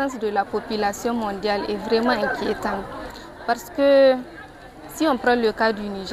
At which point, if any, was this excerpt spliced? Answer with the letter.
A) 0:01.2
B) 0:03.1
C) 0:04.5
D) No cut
D